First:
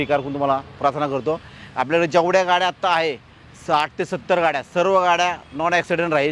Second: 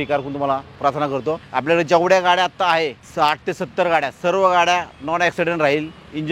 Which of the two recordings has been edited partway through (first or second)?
second